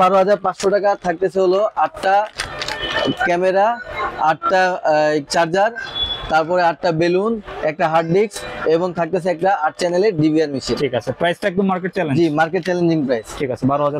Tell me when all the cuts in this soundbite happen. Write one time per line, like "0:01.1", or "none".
none